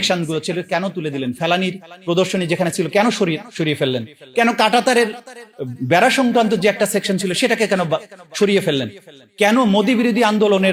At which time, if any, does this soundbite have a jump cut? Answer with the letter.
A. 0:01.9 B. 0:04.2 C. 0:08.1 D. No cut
D